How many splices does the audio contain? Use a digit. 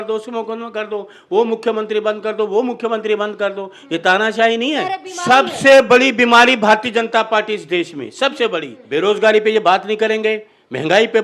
2